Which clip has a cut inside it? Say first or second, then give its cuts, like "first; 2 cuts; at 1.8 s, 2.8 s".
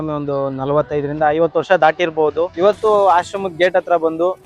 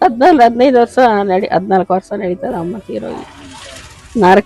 first; 1 cut; at 2.5 s